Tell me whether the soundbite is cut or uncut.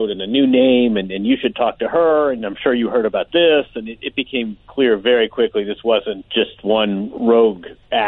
cut